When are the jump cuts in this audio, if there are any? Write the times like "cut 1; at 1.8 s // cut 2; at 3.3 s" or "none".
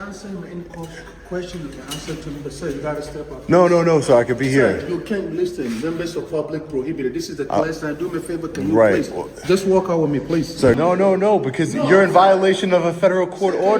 cut 1; at 10.8 s